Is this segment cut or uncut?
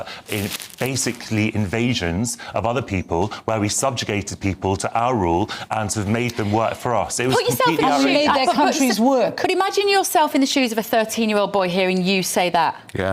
cut